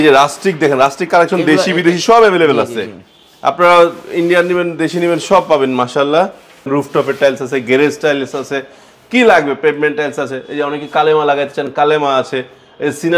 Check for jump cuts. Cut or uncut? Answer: cut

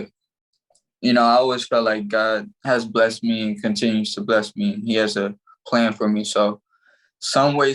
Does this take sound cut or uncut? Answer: cut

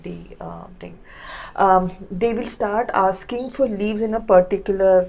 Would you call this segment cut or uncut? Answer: uncut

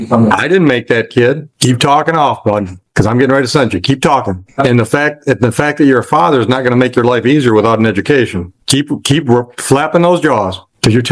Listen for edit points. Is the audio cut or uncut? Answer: cut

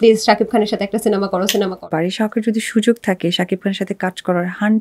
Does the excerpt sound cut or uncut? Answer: cut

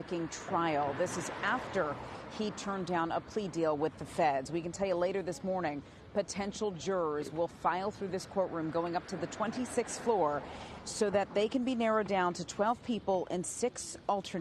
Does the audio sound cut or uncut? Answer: cut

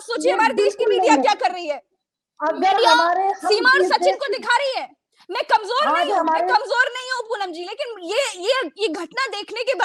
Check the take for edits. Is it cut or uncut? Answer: uncut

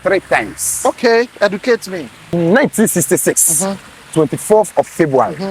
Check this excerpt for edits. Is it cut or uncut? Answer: cut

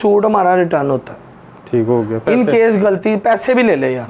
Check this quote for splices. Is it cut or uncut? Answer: uncut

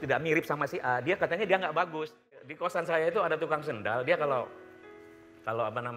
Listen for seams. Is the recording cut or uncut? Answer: cut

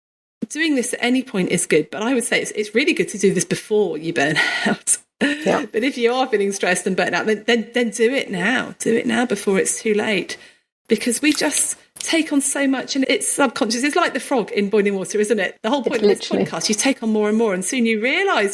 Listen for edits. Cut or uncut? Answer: cut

